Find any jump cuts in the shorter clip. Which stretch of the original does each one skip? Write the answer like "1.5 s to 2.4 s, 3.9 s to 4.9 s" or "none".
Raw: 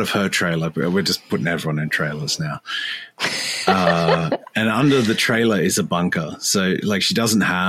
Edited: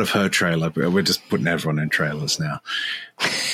none